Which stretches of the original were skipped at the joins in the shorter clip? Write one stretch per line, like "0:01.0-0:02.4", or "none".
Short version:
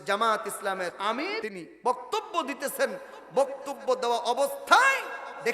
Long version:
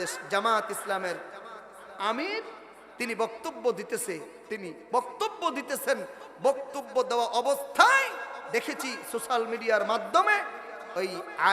0:01.5-0:04.3